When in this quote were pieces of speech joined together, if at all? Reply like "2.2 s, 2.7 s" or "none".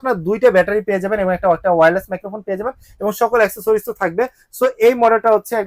none